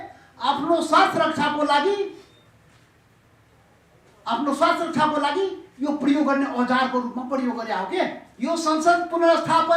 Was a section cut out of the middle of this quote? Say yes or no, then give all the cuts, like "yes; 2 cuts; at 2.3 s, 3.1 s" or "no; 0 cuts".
yes; 1 cut; at 8.2 s